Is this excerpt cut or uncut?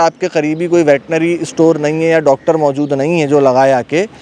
uncut